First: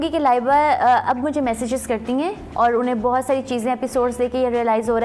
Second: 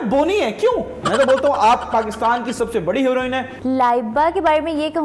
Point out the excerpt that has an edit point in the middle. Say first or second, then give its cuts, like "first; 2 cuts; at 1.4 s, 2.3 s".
second; 2 cuts; at 1.0 s, 3.5 s